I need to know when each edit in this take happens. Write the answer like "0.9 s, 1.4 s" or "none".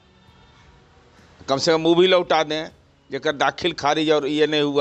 none

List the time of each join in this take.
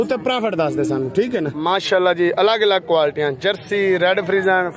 1.5 s

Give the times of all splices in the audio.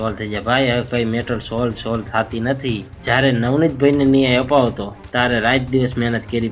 2.9 s, 4.9 s

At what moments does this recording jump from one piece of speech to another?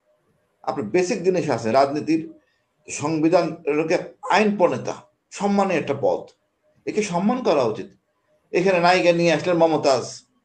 none

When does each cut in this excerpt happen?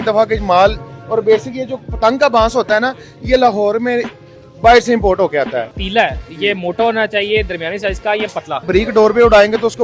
5.7 s, 8.7 s

